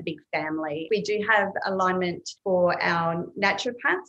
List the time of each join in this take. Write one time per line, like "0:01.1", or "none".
0:00.8
0:02.3